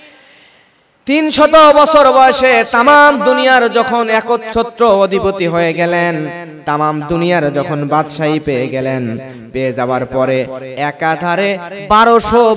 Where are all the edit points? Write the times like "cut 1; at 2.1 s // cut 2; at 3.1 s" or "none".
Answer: none

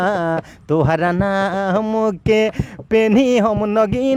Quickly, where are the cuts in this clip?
none

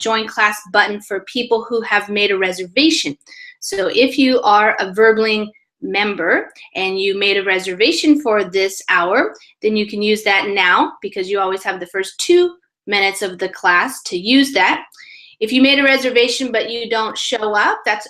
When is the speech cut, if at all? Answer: cut 1; at 1.9 s

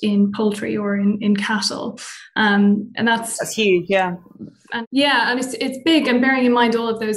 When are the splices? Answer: none

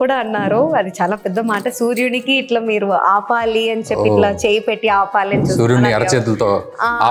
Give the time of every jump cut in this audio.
none

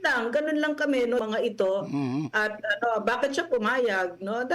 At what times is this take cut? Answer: cut 1; at 1.2 s

